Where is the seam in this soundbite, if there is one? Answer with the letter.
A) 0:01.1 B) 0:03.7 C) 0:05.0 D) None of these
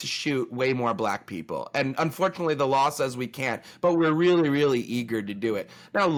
D